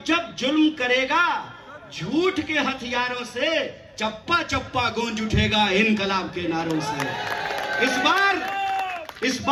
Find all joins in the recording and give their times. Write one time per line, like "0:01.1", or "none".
none